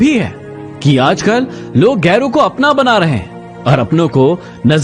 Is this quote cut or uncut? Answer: uncut